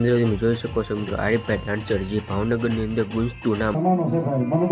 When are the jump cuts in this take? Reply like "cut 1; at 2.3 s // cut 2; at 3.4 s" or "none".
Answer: cut 1; at 3.8 s